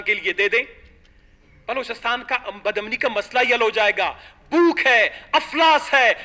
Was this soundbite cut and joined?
no; 0 cuts

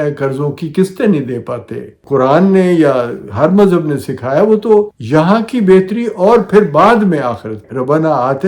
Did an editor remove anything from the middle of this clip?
yes; 3 cuts; at 2.0 s, 5.0 s, 7.6 s

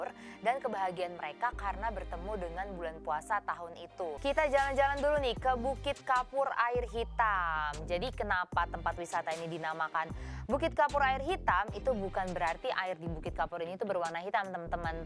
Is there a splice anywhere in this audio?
yes; 1 cut; at 4.2 s

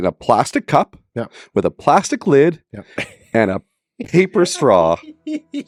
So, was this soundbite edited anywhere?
no; 0 cuts

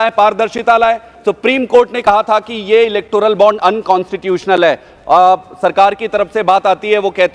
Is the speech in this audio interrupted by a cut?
yes; 1 cut; at 1.1 s

